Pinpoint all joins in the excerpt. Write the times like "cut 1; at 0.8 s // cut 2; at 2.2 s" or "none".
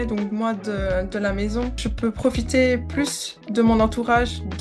none

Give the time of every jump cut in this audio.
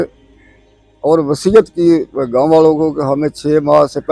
none

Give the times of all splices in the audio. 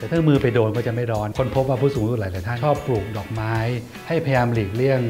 cut 1; at 1.3 s // cut 2; at 2.5 s // cut 3; at 3.9 s

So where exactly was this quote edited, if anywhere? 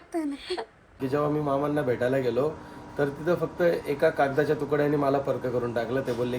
cut 1; at 1.0 s

